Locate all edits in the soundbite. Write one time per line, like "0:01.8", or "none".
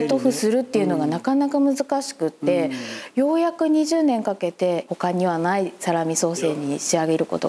0:04.8